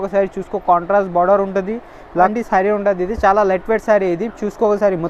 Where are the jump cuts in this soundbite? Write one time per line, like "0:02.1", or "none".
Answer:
0:02.3